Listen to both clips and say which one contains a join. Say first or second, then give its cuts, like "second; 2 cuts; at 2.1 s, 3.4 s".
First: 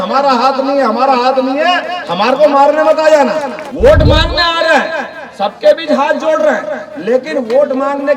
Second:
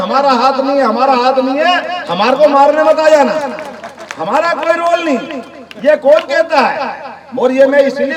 first; 1 cut; at 3.6 s